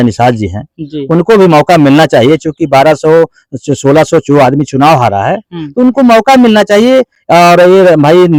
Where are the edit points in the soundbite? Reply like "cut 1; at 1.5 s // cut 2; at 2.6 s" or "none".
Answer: none